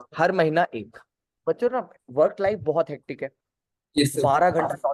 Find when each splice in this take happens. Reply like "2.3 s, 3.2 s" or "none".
1.3 s